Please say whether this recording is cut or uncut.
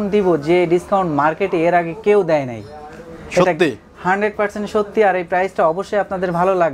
uncut